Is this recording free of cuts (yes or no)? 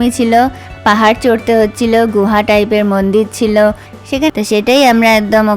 no